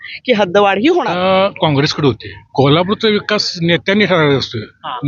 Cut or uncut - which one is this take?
cut